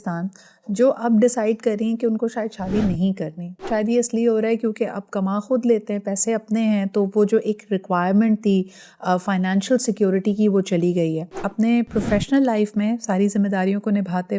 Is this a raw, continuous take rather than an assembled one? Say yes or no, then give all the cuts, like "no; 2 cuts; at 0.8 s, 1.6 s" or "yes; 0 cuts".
no; 2 cuts; at 3.7 s, 11.4 s